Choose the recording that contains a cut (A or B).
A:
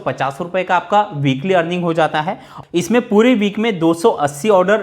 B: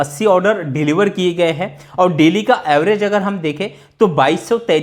A